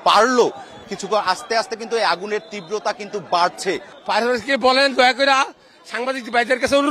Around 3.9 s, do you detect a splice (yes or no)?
yes